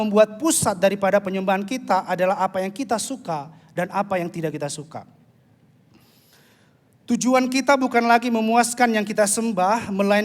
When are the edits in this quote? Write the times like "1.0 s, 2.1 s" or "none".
none